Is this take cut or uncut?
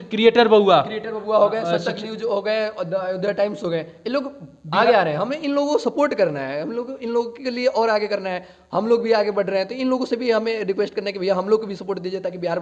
uncut